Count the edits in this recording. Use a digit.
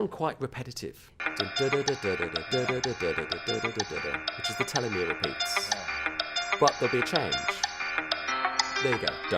2